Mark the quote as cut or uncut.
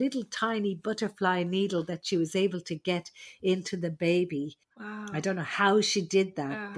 uncut